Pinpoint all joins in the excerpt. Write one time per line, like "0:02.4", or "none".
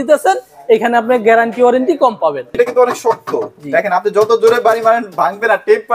0:02.5